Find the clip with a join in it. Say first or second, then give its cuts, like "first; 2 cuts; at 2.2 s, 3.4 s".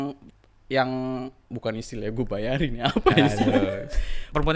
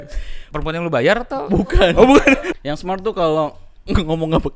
second; 1 cut; at 2.5 s